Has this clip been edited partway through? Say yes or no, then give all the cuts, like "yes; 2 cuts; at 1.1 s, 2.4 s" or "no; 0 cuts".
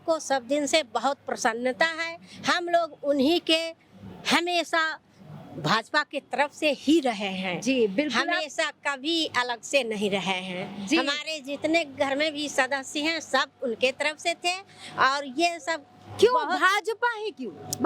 no; 0 cuts